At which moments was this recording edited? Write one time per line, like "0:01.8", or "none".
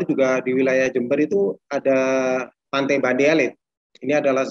0:02.6

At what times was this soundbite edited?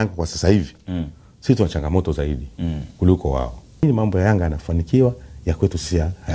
0:03.8

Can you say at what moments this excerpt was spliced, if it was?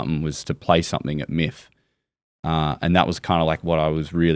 none

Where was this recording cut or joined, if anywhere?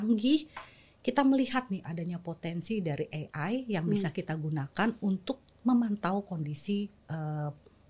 none

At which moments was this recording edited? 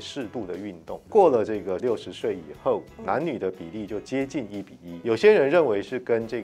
0:01.1
0:01.8
0:04.8

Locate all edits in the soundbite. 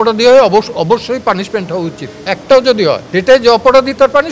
0:02.3
0:03.0

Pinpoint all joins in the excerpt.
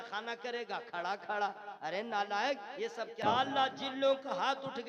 0:03.2

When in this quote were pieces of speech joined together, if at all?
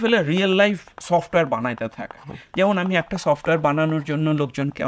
none

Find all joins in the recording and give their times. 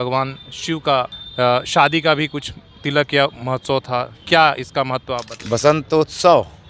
0:01.2
0:05.3

